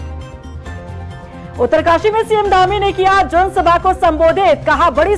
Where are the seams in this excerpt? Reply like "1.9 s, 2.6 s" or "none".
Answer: 1.0 s